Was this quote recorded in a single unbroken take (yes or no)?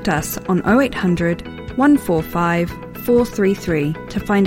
yes